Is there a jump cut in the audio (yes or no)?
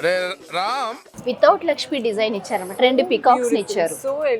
yes